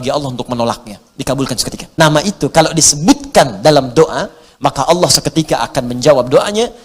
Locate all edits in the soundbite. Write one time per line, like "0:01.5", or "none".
0:01.8